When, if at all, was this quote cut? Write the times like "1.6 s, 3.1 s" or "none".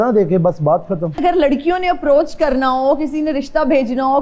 1.2 s